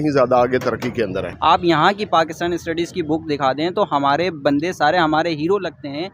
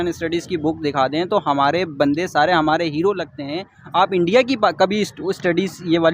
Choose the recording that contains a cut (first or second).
first